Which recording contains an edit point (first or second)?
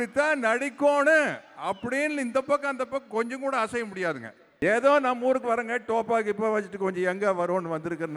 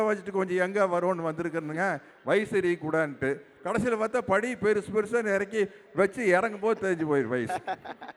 first